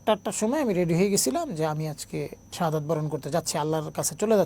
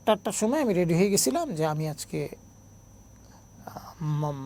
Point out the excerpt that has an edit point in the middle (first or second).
first